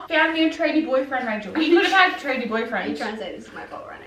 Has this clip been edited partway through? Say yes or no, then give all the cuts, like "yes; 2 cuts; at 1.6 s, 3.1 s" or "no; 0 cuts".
no; 0 cuts